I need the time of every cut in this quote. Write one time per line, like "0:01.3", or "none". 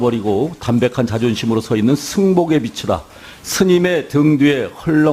0:02.3